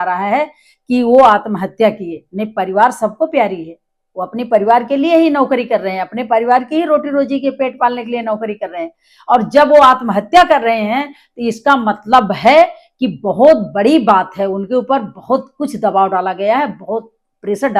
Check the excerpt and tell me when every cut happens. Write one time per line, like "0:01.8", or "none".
none